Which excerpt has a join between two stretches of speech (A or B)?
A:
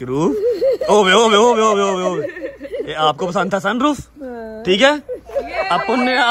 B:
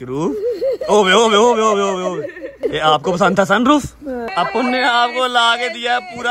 B